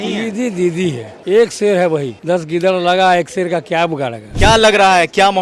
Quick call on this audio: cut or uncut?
cut